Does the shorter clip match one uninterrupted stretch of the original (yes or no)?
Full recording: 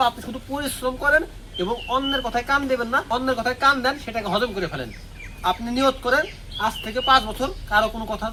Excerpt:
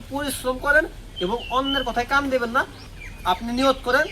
no